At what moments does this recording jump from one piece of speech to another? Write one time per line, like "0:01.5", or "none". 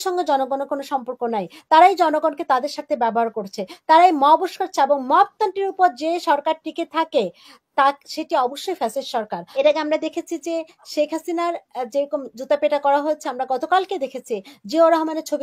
0:09.4